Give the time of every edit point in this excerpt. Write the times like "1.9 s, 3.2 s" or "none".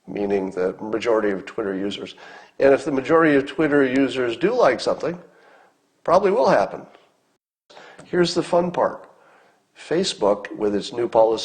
7.7 s